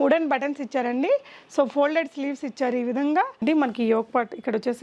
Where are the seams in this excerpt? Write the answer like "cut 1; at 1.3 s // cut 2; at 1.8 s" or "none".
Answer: cut 1; at 3.4 s